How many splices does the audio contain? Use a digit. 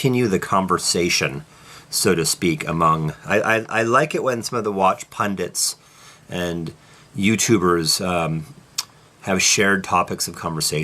1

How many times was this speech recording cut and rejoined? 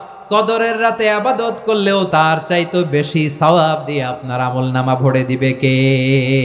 1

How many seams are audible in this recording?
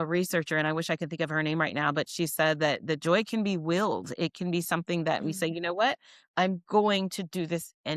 0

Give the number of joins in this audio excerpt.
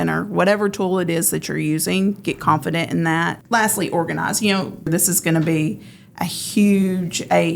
2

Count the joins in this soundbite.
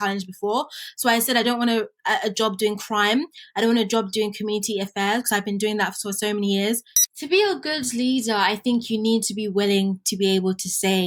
1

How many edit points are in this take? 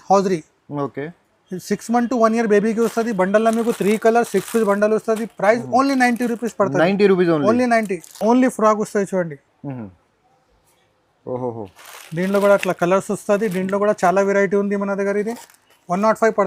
0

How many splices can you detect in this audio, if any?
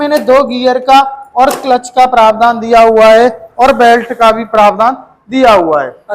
0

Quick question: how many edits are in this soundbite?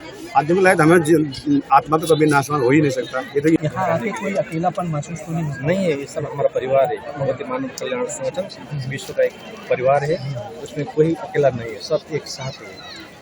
1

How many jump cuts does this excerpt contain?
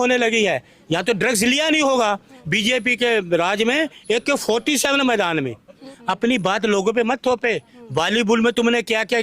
2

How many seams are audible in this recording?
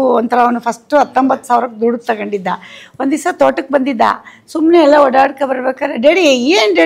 0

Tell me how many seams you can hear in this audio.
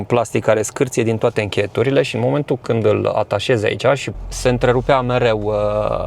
1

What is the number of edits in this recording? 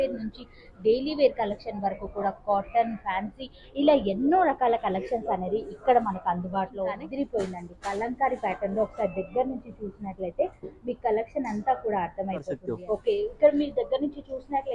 2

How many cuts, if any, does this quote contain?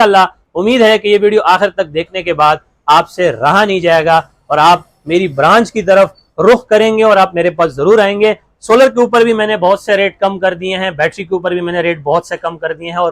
0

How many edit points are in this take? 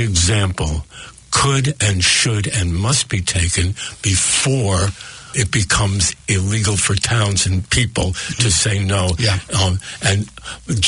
0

